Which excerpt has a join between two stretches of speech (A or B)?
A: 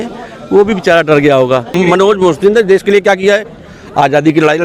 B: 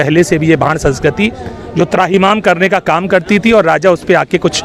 A